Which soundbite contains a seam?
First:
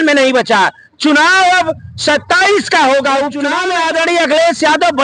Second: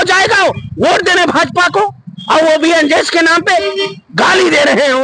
first; 1 cut; at 3.5 s

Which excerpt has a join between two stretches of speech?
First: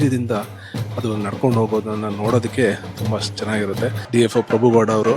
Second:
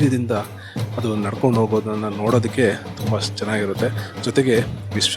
first; 1 cut; at 4.0 s

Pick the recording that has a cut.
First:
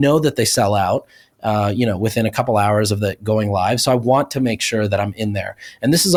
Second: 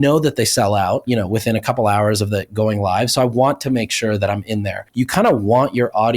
second; 2 cuts; at 1.0 s, 4.8 s

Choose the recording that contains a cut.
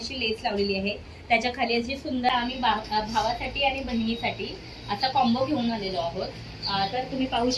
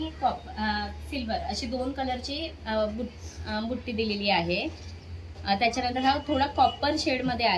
first; 1 cut; at 2.3 s

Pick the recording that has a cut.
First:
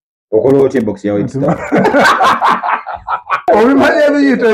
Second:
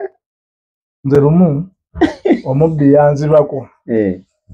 first; 1 cut; at 3.5 s

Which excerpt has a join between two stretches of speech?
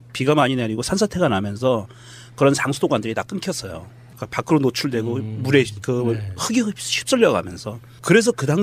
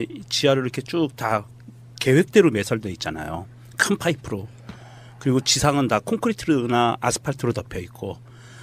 first; 1 cut; at 6.8 s

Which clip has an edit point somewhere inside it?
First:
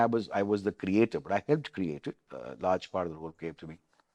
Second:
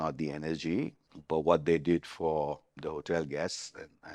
second; 2 cuts; at 1.1 s, 2.7 s

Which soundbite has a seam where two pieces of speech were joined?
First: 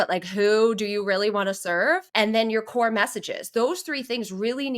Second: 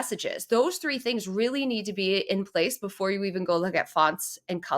first; 1 cut; at 2.1 s

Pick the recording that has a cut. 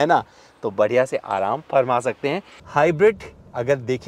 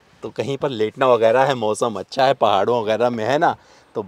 first; 1 cut; at 2.5 s

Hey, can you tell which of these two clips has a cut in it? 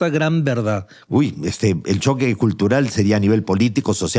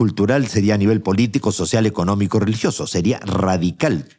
first; 1 cut; at 0.9 s

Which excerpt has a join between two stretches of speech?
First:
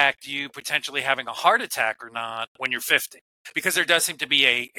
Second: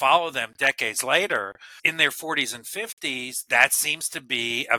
second; 1 cut; at 1.8 s

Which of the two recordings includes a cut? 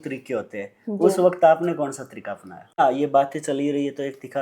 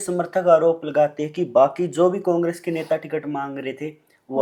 first; 1 cut; at 2.8 s

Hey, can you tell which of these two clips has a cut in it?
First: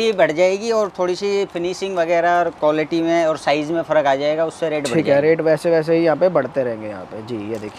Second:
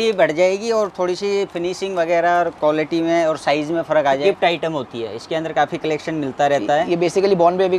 second; 1 cut; at 4.2 s

